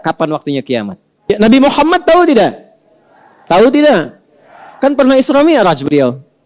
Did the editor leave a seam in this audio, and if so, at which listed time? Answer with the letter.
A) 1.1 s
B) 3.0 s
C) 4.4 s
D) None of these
A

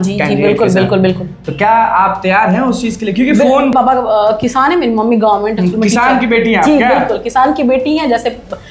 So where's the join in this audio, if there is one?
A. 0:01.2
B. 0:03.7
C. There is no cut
B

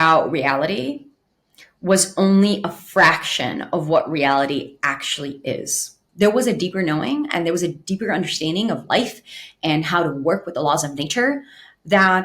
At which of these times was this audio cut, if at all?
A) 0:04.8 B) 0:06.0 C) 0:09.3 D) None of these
B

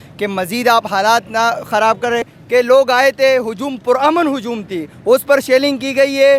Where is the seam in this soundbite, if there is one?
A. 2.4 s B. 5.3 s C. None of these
A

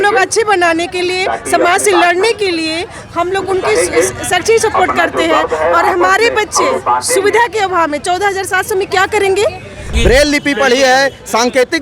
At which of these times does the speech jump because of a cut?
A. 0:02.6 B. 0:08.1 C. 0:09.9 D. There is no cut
C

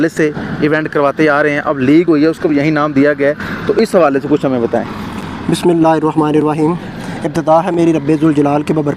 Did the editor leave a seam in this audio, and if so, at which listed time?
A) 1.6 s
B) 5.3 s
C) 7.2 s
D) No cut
D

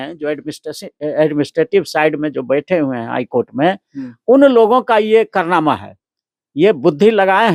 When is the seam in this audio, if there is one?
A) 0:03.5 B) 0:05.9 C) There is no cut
C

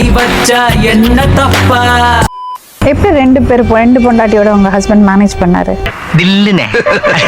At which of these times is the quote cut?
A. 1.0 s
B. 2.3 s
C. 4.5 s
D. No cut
B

